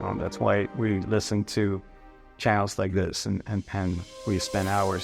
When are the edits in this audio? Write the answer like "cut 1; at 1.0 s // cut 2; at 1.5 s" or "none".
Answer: none